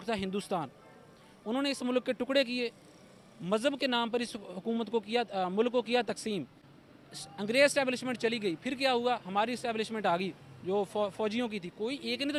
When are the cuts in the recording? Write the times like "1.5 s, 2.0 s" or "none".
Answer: none